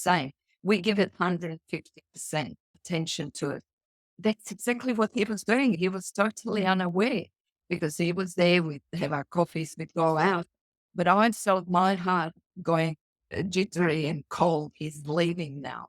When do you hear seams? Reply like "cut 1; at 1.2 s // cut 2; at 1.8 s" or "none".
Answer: cut 1; at 2.7 s // cut 2; at 4.1 s // cut 3; at 5.8 s